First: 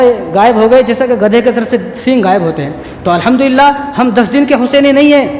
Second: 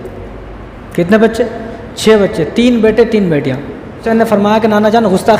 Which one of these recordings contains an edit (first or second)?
second